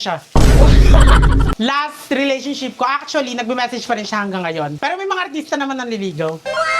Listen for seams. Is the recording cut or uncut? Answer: cut